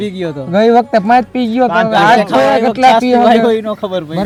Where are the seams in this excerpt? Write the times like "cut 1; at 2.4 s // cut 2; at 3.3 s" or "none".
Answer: none